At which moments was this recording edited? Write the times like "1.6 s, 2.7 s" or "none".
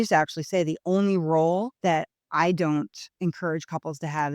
1.7 s